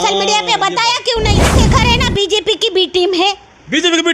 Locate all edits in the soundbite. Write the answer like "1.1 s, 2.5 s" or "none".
1.6 s

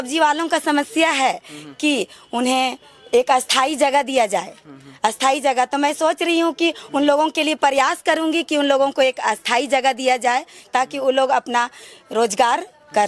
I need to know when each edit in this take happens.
none

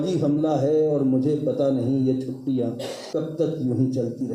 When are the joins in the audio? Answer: 2.9 s

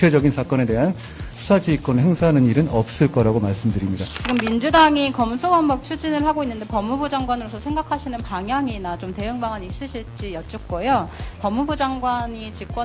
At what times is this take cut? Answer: 4.1 s, 11.4 s

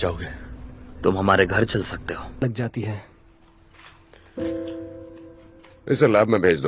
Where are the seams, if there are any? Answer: 2.4 s

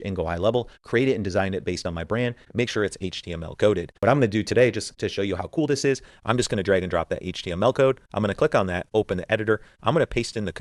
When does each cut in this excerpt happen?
3.9 s

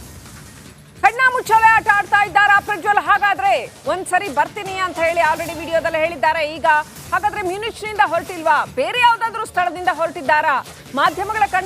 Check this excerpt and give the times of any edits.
0.9 s

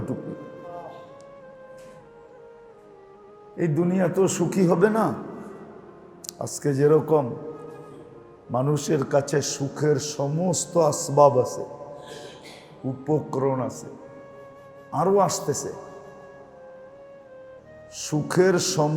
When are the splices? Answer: 16.0 s, 17.4 s

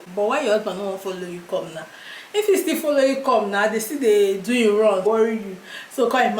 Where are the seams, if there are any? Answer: 5.1 s

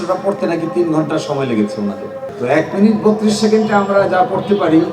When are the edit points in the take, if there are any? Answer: 2.2 s

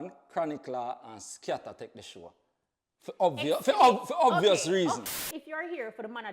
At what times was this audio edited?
5.2 s

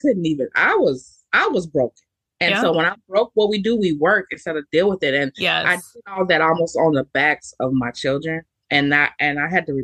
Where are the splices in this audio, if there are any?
none

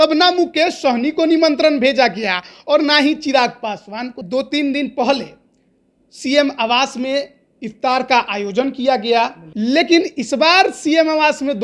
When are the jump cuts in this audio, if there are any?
4.2 s, 9.4 s

